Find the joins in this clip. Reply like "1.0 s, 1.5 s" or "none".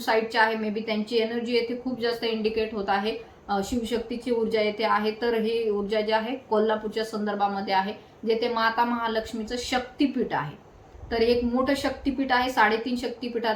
none